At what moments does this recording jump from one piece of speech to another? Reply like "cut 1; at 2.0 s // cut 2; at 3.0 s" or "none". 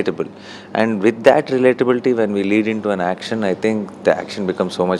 none